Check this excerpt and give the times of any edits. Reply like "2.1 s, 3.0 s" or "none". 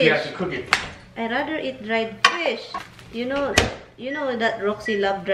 none